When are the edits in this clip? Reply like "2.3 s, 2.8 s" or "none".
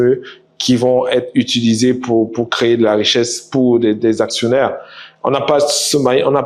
none